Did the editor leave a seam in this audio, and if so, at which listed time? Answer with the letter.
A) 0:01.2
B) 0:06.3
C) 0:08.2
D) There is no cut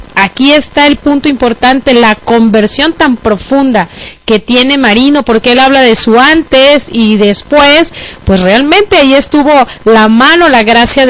A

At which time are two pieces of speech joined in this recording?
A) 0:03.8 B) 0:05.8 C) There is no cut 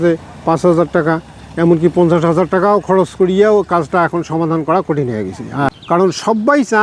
B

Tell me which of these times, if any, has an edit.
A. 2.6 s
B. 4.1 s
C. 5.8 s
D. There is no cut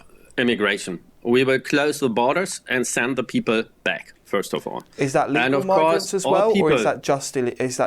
D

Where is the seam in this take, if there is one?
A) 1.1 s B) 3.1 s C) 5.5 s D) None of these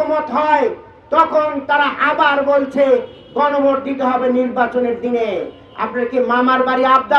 D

